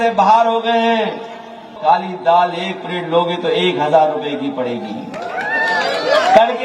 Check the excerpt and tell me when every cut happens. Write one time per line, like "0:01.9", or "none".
0:01.7